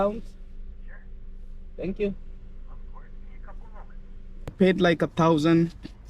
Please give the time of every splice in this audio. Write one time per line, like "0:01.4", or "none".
0:04.5